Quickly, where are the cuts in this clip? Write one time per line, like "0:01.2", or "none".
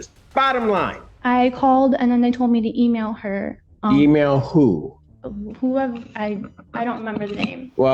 0:01.1